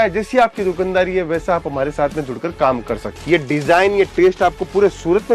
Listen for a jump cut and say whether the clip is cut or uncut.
cut